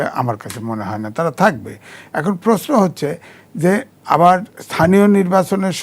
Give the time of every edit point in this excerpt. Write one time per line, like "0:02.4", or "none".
none